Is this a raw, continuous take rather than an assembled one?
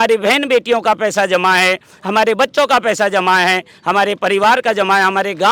yes; 0 cuts

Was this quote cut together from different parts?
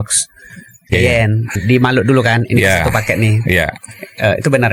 yes; 1 cut; at 1.5 s

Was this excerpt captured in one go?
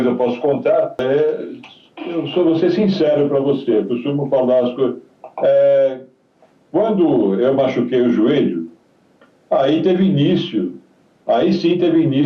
no; 1 cut; at 1.0 s

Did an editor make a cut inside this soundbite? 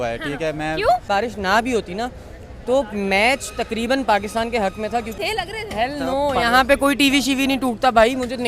yes; 2 cuts; at 1.1 s, 5.1 s

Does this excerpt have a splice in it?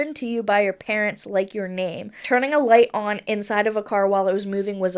yes; 1 cut; at 2.2 s

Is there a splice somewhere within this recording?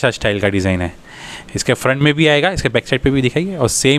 no; 0 cuts

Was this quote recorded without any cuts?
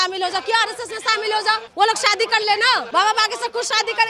no; 2 cuts; at 1.7 s, 2.9 s

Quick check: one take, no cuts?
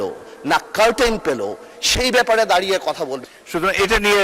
no; 1 cut; at 3.2 s

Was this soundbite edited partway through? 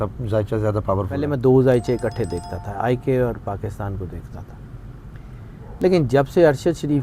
yes; 1 cut; at 1.3 s

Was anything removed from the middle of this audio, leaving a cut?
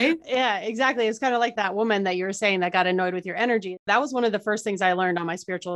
yes; 2 cuts; at 1.5 s, 3.7 s

